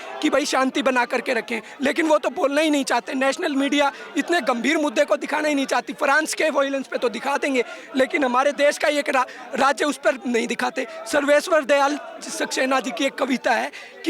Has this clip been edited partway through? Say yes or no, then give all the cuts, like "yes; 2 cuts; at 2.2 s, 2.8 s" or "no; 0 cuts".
no; 0 cuts